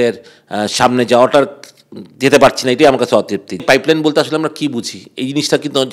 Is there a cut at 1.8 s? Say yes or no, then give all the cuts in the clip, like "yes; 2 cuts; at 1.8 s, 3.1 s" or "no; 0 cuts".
no; 1 cut; at 3.6 s